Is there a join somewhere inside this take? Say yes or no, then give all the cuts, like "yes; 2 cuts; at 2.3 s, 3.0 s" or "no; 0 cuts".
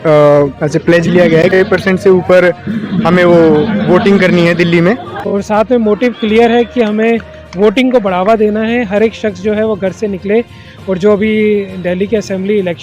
yes; 2 cuts; at 1.5 s, 5.2 s